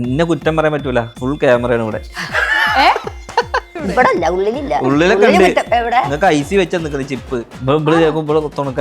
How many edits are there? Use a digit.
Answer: 3